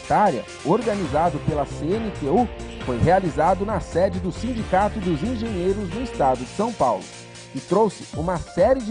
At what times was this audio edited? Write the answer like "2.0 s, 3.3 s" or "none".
none